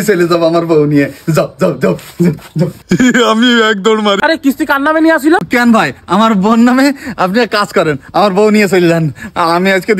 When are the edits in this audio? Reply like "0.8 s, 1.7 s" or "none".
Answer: 4.2 s